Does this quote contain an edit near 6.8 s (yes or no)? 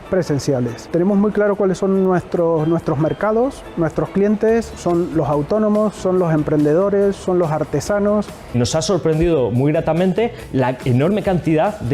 no